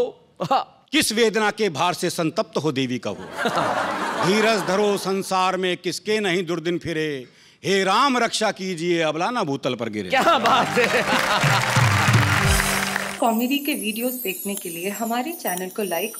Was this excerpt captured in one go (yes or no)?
no